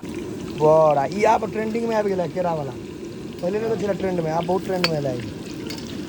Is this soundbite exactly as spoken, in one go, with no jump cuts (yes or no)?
yes